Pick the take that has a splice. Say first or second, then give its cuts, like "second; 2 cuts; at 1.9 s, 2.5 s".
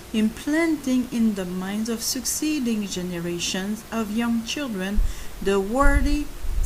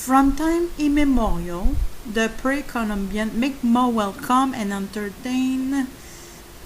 second; 1 cut; at 3.1 s